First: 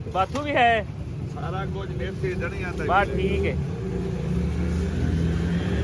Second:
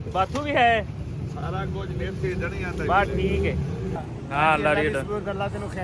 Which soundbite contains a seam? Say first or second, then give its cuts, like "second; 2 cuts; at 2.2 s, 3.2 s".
second; 1 cut; at 4.0 s